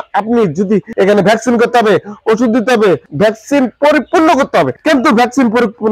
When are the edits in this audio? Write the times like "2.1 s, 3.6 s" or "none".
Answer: 0.9 s, 3.1 s, 4.8 s